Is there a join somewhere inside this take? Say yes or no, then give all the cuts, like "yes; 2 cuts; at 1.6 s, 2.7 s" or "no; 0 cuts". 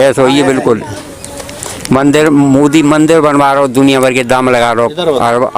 no; 0 cuts